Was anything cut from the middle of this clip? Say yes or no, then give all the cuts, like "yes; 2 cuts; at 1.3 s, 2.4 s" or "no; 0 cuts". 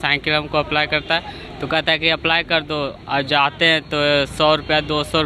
no; 0 cuts